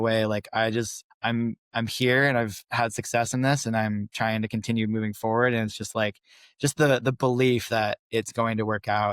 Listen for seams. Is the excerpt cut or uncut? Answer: cut